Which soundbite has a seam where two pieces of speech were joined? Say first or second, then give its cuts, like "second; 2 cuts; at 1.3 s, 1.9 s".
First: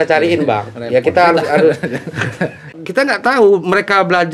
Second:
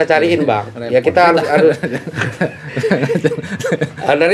first; 1 cut; at 2.7 s